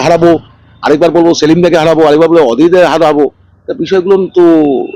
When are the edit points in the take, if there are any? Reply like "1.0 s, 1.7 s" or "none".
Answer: none